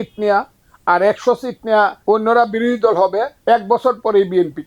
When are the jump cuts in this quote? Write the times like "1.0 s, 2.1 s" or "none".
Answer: 2.0 s, 3.3 s